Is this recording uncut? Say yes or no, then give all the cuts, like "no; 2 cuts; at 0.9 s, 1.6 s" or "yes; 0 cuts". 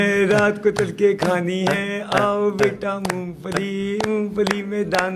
yes; 0 cuts